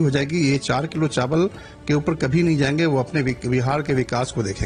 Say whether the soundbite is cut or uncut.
uncut